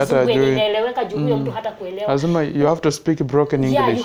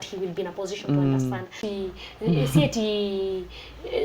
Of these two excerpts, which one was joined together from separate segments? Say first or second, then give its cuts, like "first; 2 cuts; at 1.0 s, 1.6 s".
second; 1 cut; at 1.6 s